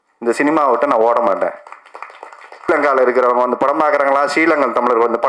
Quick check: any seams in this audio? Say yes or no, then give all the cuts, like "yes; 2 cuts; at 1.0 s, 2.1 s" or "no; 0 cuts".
yes; 1 cut; at 2.7 s